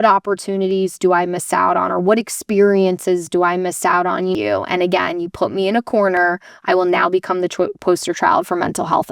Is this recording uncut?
no; 1 cut; at 4.3 s

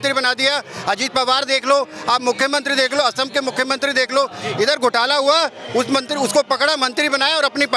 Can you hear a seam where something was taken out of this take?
no; 0 cuts

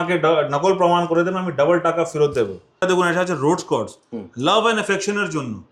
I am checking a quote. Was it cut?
yes; 1 cut; at 2.6 s

